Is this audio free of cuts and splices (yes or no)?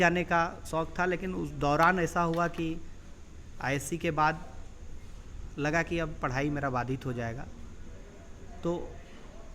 yes